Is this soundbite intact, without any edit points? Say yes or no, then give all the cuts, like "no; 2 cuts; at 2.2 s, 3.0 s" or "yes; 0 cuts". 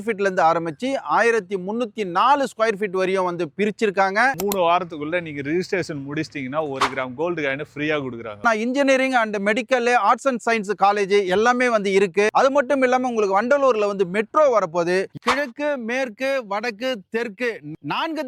no; 4 cuts; at 4.3 s, 8.4 s, 12.3 s, 15.1 s